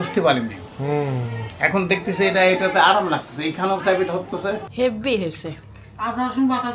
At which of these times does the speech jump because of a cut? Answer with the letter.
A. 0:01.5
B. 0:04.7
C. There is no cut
B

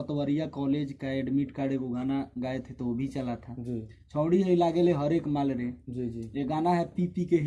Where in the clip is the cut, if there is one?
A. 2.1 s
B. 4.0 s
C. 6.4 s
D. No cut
D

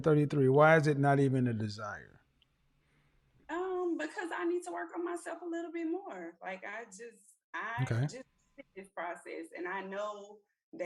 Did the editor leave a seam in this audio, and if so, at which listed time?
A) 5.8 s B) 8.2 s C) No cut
C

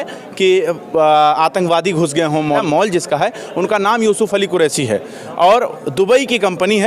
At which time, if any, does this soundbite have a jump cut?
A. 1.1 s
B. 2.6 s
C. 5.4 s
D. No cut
B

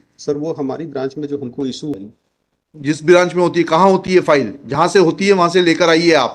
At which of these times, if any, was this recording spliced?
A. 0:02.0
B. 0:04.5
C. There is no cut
A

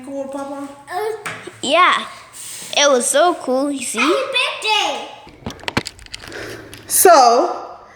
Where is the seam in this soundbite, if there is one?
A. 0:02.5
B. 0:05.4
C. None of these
B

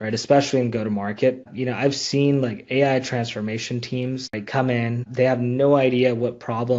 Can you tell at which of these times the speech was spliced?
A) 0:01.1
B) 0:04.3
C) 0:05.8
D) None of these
B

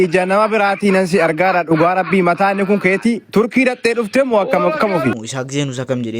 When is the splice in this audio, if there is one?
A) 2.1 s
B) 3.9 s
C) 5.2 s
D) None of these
C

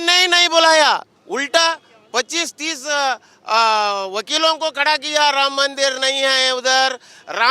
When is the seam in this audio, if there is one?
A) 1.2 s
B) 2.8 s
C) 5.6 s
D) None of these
A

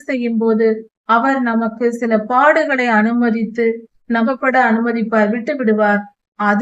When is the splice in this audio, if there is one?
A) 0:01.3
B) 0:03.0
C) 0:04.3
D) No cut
C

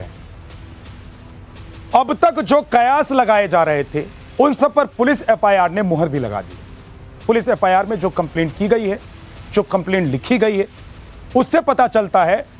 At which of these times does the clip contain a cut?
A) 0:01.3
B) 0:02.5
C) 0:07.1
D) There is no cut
D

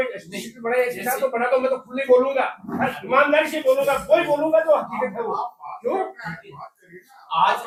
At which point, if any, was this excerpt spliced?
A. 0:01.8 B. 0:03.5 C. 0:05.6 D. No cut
D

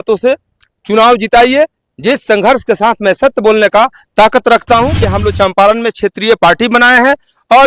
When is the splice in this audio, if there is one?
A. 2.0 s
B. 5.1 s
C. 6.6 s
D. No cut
B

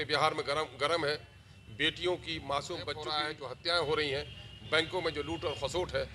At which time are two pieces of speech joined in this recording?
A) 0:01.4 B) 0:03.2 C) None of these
B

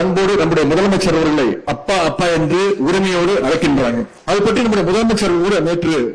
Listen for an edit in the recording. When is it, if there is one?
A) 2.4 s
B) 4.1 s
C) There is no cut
B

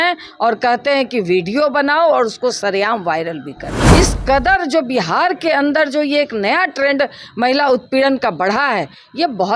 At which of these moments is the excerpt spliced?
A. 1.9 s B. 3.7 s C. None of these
B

